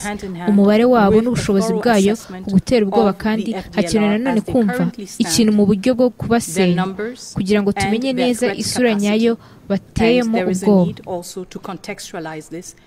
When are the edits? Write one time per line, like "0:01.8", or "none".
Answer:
none